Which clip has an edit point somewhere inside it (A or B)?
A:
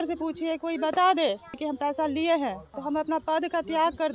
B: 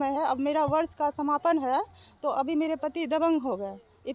A